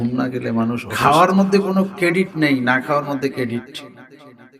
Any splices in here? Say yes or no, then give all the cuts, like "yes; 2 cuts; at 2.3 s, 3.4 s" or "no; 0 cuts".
yes; 2 cuts; at 0.9 s, 3.7 s